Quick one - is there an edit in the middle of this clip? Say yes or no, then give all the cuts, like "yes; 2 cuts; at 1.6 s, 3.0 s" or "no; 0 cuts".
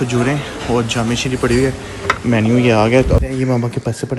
yes; 1 cut; at 3.2 s